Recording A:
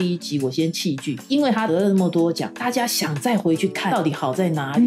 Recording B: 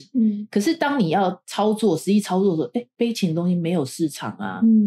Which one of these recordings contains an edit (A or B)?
A